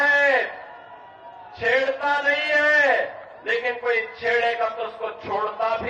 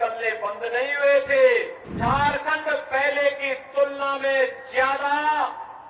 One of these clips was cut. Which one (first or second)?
second